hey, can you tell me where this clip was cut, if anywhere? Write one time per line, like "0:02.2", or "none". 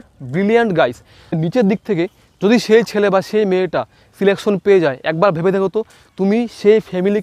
0:01.4

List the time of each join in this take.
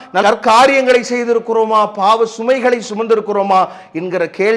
none

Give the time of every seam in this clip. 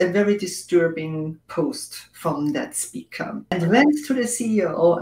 0:03.5

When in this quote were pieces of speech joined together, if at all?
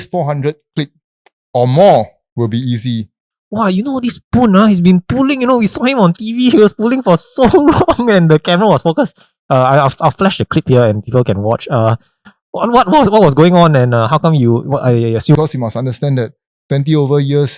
0:03.3
0:15.4

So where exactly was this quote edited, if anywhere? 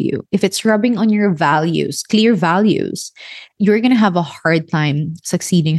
0:03.5

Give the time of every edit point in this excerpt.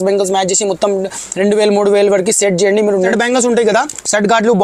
0:03.0

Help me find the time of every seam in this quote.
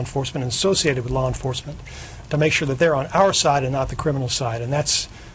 none

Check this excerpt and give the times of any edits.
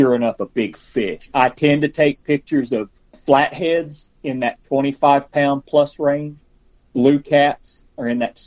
0:01.3
0:03.2
0:06.8

